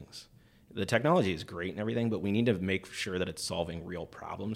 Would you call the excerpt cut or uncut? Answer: uncut